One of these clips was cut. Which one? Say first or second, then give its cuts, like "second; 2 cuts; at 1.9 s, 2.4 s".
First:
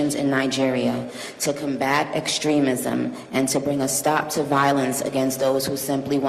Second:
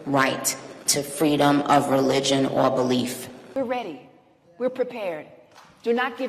second; 1 cut; at 3.3 s